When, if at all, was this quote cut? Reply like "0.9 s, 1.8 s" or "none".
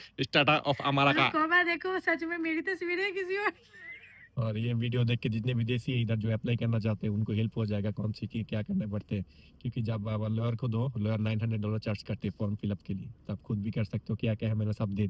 4.3 s